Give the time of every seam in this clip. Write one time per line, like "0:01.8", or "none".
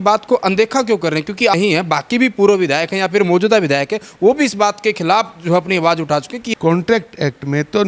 0:01.5
0:06.4